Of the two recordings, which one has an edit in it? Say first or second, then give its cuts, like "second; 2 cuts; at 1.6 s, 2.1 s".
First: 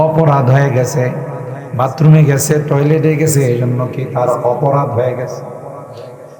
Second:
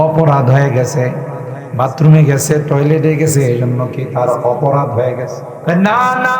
second; 1 cut; at 5.5 s